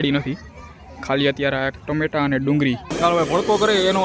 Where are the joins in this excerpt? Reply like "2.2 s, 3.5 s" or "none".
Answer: 2.9 s